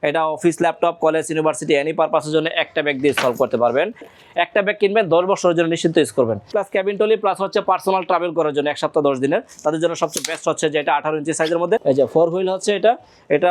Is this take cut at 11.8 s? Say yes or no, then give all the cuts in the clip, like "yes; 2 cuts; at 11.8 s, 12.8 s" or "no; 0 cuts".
yes; 3 cuts; at 4.1 s, 6.5 s, 11.8 s